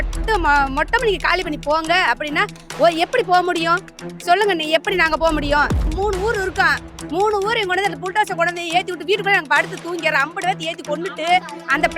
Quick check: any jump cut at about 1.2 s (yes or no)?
no